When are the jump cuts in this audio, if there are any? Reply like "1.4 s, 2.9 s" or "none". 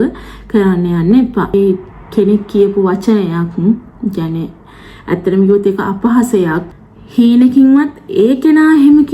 1.5 s, 6.6 s